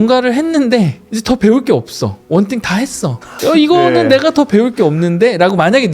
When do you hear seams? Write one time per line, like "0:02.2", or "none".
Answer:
0:01.1
0:02.2
0:03.3

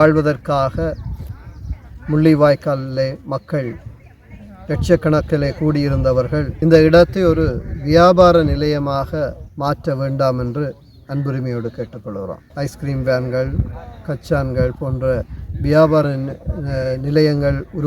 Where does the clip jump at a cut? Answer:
0:06.5
0:12.4

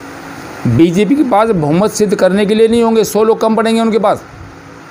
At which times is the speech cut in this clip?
none

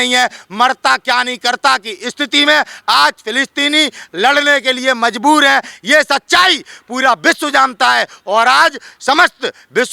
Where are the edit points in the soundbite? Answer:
none

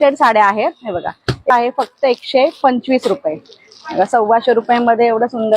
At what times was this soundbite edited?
0:01.5

